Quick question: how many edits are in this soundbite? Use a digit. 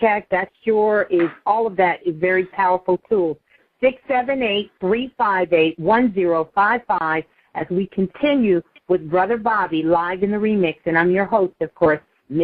1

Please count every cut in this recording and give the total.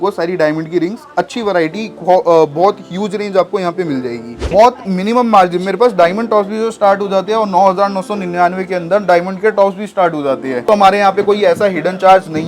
2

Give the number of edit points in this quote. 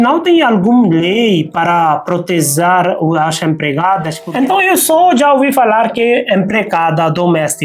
1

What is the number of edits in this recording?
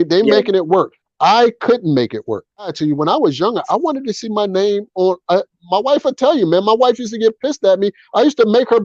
1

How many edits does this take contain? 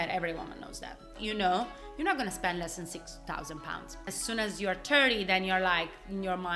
2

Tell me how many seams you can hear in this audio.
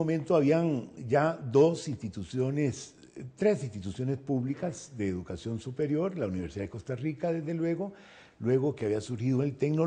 1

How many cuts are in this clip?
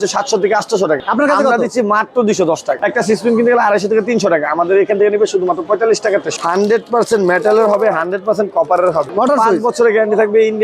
4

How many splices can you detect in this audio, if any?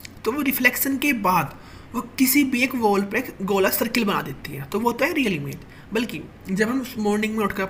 0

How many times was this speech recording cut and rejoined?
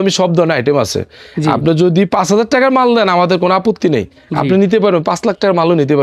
0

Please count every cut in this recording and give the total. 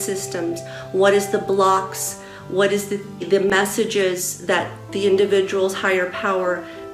1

